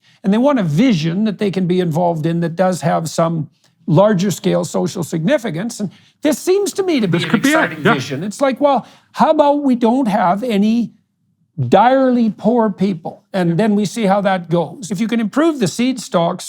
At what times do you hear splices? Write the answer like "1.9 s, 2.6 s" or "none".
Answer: 14.8 s